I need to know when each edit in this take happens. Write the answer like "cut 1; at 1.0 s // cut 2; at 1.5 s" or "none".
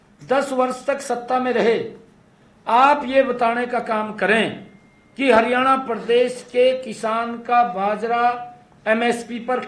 none